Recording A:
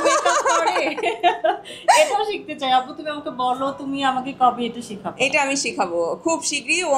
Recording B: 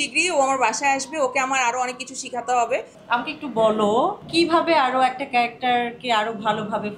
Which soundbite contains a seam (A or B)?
B